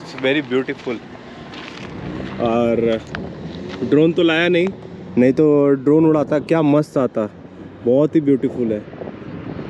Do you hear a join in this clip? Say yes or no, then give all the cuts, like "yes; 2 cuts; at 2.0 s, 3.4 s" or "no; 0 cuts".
no; 0 cuts